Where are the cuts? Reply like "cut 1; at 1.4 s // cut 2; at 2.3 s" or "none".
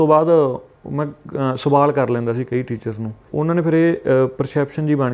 cut 1; at 3.3 s